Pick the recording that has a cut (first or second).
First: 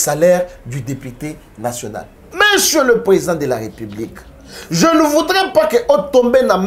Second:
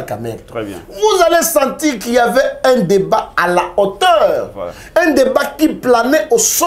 first